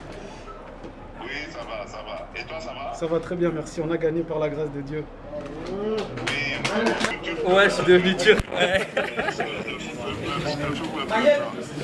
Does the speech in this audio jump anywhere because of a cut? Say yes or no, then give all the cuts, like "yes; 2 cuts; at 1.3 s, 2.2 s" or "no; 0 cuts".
yes; 1 cut; at 7.1 s